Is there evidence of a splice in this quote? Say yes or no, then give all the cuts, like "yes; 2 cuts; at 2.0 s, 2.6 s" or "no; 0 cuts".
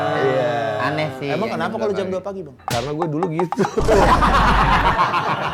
yes; 1 cut; at 2.6 s